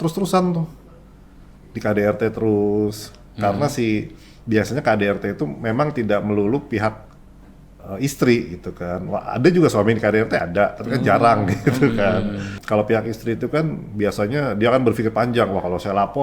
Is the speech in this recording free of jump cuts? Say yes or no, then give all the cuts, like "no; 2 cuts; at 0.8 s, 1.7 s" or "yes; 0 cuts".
no; 1 cut; at 12.5 s